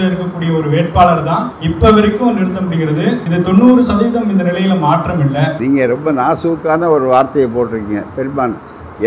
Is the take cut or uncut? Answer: cut